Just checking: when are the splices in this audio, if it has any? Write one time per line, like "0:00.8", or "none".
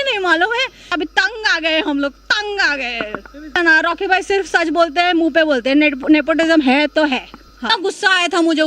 0:00.9
0:03.6
0:07.6